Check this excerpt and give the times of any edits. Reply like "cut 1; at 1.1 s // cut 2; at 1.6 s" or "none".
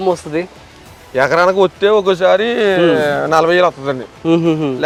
none